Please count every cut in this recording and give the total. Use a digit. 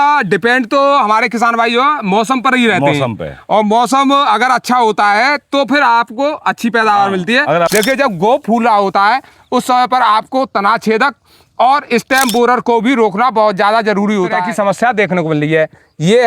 2